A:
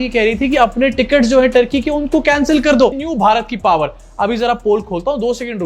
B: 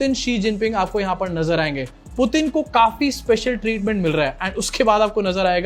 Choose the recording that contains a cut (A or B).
A